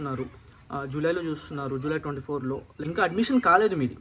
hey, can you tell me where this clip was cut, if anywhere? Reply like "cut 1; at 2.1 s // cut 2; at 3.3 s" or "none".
cut 1; at 2.7 s